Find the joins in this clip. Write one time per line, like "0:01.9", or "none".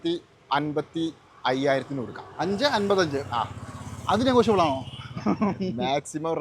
none